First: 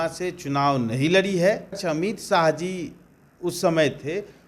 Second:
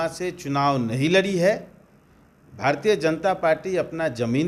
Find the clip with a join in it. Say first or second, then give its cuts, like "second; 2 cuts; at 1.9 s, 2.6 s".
first; 1 cut; at 1.8 s